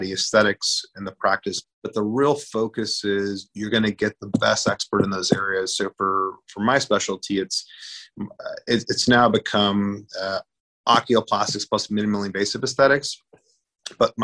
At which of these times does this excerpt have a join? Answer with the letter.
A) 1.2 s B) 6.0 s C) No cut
A